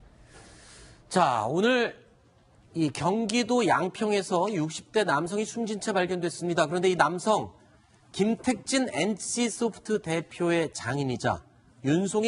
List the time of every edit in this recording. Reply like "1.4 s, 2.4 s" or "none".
6.1 s